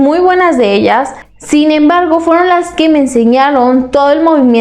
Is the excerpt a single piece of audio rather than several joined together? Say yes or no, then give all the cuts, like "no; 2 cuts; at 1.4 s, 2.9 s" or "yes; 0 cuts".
no; 1 cut; at 1.1 s